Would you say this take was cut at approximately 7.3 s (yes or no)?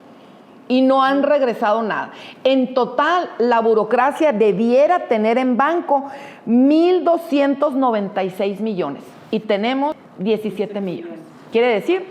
no